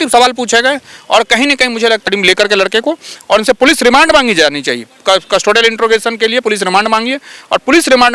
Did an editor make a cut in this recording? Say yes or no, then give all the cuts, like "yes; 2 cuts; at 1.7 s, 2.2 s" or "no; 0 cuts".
yes; 1 cut; at 2.1 s